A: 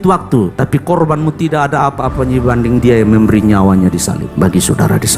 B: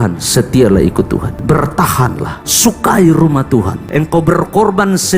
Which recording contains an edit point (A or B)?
B